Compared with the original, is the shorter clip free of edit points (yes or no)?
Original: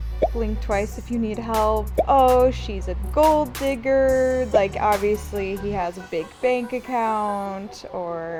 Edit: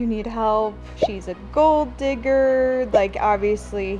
no